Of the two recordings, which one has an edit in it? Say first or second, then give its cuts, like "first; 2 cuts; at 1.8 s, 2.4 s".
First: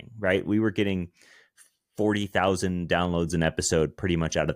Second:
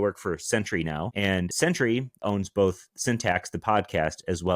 second; 1 cut; at 1.3 s